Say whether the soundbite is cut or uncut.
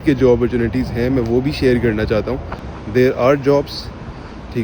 cut